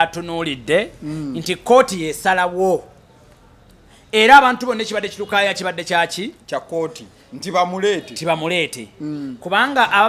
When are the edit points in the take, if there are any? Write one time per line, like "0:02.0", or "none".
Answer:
none